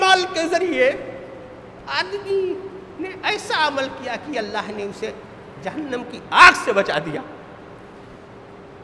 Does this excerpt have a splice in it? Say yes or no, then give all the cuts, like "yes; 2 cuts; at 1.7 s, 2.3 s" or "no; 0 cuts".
no; 0 cuts